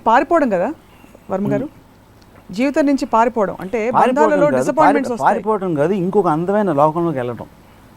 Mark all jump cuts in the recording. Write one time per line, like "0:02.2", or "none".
none